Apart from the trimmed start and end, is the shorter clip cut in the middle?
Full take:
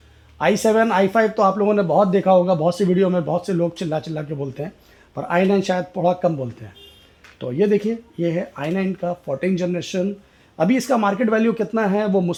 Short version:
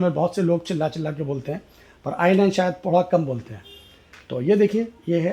no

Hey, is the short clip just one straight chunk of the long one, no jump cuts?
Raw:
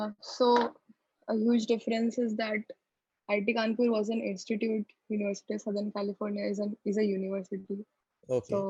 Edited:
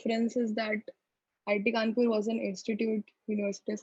yes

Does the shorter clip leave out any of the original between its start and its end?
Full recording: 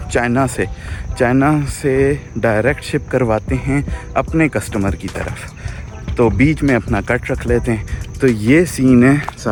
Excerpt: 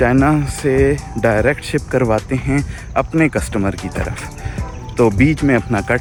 no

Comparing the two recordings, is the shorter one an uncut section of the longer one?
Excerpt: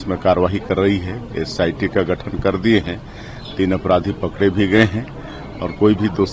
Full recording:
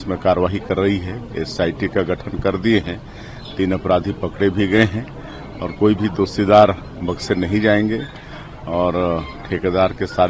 yes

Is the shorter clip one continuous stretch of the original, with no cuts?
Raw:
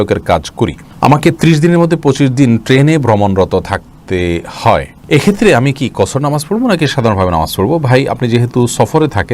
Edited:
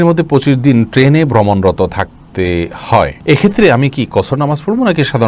no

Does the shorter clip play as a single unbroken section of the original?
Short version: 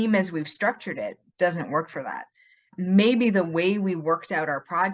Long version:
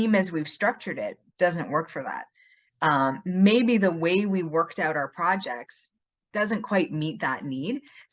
no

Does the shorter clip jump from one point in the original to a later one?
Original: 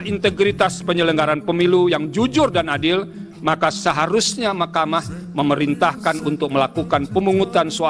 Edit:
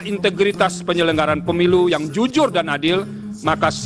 no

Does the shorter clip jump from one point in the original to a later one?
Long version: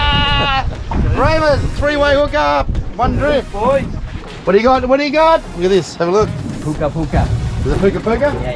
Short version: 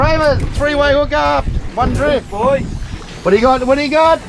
no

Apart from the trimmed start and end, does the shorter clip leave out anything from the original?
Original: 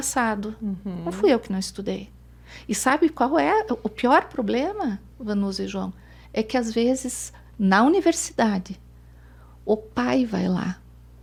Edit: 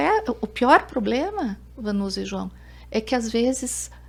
no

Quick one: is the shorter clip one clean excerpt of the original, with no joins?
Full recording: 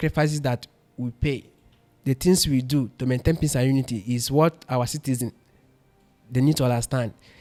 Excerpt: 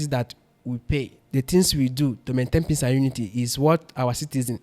no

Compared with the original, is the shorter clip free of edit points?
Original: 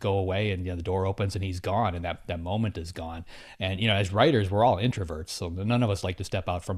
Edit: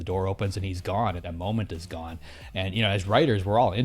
no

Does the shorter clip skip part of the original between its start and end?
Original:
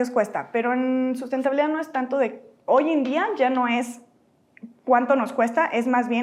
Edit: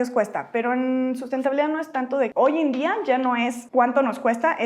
yes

